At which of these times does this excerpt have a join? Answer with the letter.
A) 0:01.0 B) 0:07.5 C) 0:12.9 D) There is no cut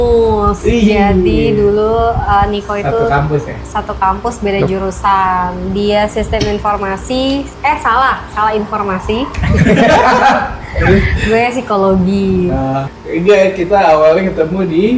C